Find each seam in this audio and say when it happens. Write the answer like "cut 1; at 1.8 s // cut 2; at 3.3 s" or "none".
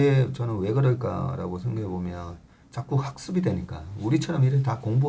none